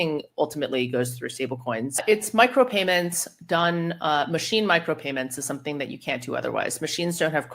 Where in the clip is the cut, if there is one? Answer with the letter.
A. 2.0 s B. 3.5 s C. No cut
A